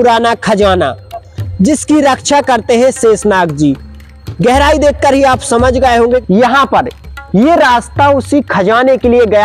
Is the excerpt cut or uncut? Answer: cut